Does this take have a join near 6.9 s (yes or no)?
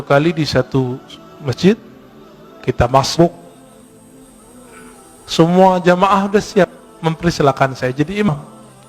no